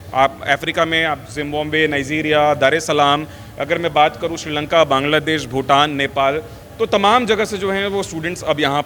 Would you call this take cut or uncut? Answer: uncut